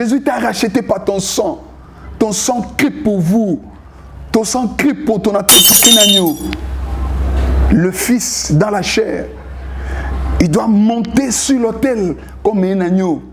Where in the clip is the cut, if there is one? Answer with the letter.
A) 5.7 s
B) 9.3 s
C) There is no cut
A